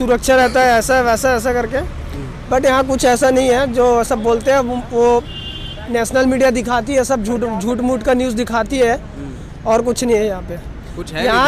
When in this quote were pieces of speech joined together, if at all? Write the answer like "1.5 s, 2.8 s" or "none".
none